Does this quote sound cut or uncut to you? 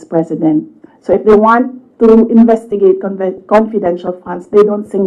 uncut